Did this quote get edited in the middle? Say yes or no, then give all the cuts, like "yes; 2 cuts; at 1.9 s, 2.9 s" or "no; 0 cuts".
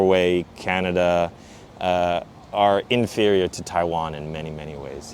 no; 0 cuts